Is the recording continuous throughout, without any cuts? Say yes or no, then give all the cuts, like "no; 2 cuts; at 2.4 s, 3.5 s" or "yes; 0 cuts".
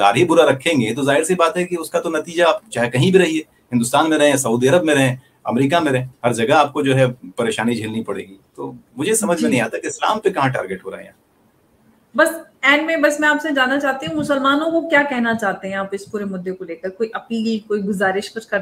yes; 0 cuts